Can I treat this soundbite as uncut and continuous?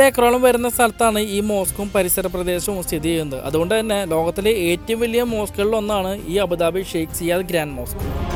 yes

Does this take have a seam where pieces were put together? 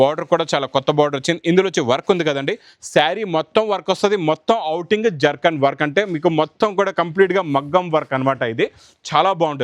no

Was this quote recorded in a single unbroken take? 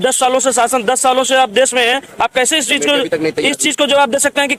yes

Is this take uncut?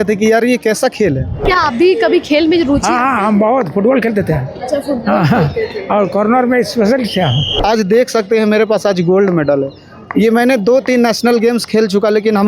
no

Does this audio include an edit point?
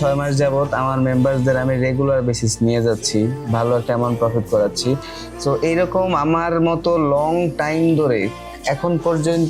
no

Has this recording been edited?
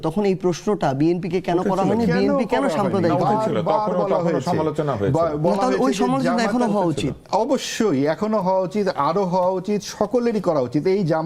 no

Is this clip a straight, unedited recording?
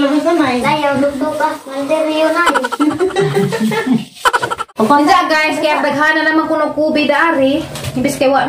no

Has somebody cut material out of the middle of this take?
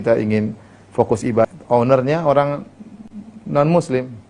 yes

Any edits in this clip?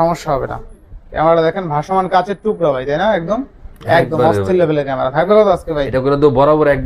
no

